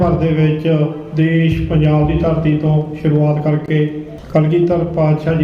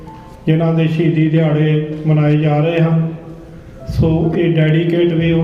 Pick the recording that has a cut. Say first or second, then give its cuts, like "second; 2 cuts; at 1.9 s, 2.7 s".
first; 1 cut; at 4.1 s